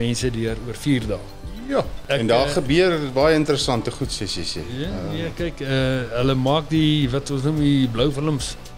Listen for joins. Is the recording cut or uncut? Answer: cut